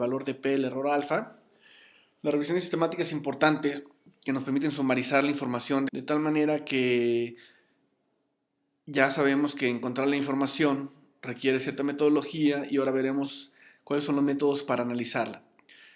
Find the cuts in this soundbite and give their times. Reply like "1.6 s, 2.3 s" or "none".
none